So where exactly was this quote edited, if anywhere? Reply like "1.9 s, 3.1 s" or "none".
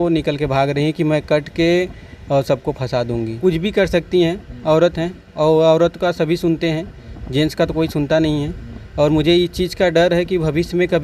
3.3 s